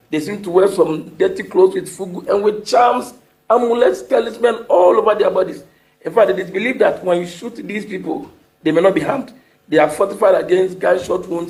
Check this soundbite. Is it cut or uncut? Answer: uncut